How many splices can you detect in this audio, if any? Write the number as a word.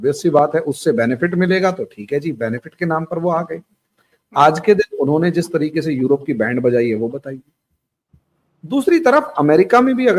zero